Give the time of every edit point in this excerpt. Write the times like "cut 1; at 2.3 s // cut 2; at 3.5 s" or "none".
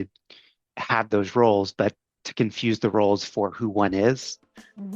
none